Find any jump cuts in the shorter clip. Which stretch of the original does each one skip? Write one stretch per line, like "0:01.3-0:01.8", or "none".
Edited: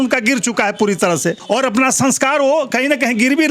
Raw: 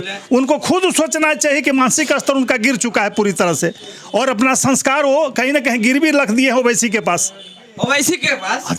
0:03.8-0:04.0